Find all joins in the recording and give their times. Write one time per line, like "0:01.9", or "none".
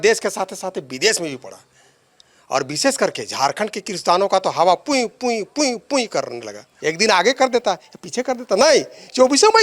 0:06.7